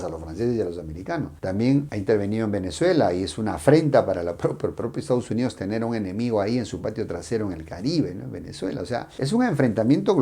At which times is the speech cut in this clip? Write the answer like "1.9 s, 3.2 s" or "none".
none